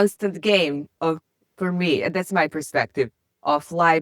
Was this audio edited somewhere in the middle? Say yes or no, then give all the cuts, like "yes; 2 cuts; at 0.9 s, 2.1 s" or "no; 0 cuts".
no; 0 cuts